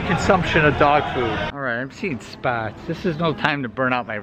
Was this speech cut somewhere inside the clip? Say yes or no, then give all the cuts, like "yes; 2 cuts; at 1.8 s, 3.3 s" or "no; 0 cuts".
yes; 1 cut; at 1.5 s